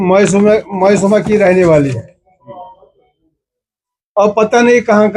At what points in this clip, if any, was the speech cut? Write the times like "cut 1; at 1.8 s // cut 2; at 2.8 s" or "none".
none

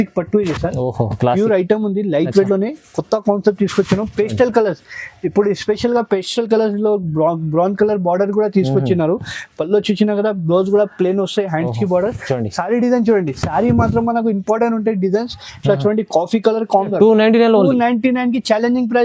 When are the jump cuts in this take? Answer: cut 1; at 16.8 s

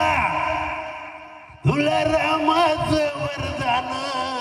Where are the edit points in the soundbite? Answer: none

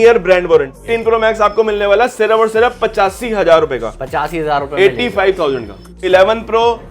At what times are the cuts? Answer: cut 1; at 0.9 s // cut 2; at 6.0 s

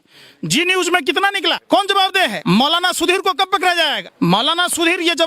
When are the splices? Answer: cut 1; at 1.6 s // cut 2; at 2.4 s // cut 3; at 4.0 s

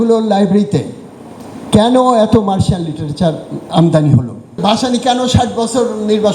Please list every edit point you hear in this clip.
cut 1; at 4.6 s

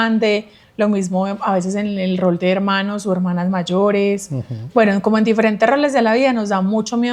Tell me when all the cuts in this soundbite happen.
none

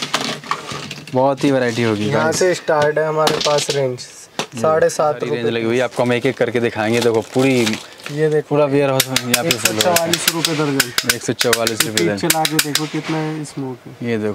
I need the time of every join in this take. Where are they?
cut 1; at 5.4 s

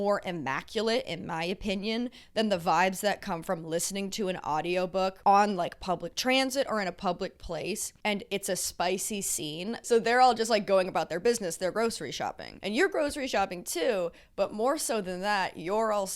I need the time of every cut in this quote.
cut 1; at 9.8 s // cut 2; at 12.5 s

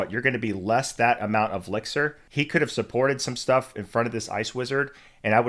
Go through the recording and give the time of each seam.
cut 1; at 2.2 s

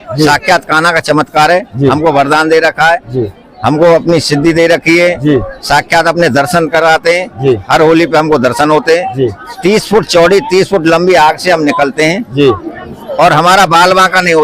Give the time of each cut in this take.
cut 1; at 9.4 s

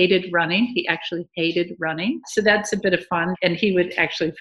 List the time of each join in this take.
cut 1; at 2.2 s // cut 2; at 3.3 s

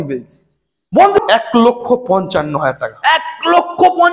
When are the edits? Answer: cut 1; at 1.2 s

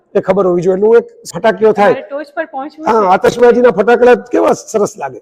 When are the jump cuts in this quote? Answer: cut 1; at 1.3 s

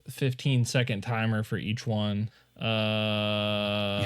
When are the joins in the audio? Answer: cut 1; at 2.4 s

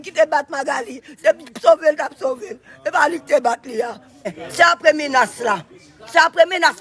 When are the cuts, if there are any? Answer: cut 1; at 4.4 s

